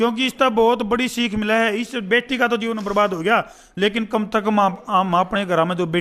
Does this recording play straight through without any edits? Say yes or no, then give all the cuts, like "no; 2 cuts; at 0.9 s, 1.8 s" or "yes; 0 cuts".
yes; 0 cuts